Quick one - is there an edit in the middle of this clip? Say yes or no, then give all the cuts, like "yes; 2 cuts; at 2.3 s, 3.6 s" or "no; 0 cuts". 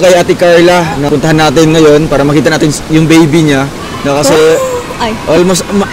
yes; 1 cut; at 1.0 s